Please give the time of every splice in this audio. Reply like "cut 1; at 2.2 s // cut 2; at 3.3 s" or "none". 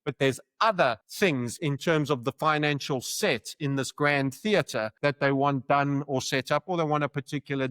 cut 1; at 1.1 s // cut 2; at 4.9 s